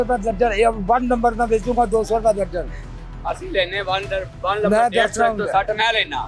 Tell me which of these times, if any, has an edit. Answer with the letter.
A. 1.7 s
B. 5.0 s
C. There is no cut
C